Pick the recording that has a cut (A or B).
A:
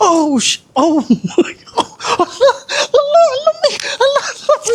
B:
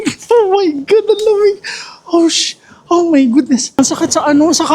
B